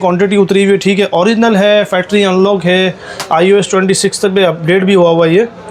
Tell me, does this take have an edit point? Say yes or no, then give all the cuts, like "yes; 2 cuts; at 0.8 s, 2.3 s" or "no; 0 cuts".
no; 0 cuts